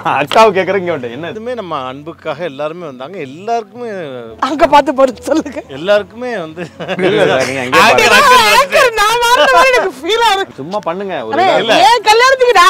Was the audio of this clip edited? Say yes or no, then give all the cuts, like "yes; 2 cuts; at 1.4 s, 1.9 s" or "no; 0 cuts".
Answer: yes; 2 cuts; at 1.4 s, 10.5 s